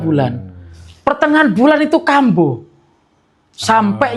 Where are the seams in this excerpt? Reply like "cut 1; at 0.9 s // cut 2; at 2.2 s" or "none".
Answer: none